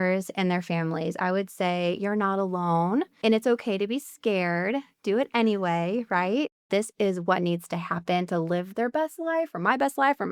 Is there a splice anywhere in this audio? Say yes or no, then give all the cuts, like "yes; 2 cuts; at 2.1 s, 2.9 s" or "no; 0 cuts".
yes; 2 cuts; at 3.1 s, 6.6 s